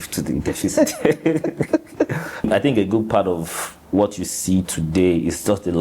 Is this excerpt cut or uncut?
cut